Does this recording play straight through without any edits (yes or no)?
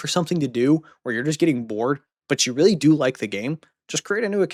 yes